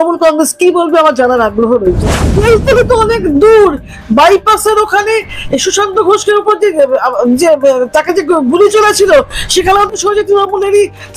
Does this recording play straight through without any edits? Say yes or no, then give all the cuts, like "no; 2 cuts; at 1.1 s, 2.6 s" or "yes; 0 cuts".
no; 1 cut; at 2.2 s